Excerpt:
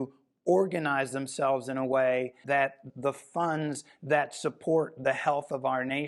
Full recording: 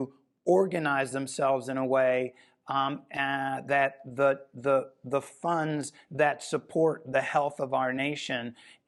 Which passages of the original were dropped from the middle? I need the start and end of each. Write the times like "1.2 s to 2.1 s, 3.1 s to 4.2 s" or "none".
2.7 s to 4.8 s